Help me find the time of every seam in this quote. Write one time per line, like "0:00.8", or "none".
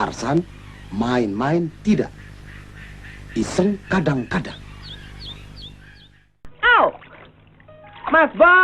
0:06.5